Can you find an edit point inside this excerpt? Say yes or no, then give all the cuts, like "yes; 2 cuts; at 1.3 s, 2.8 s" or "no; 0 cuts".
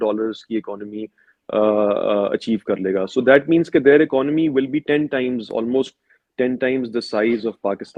no; 0 cuts